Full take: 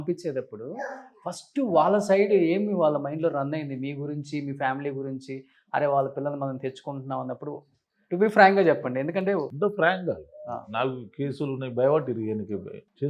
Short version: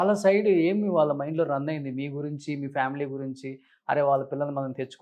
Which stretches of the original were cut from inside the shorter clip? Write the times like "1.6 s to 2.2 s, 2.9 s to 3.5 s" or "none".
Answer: none